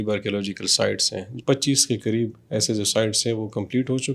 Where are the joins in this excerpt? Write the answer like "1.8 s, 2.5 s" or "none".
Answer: 1.3 s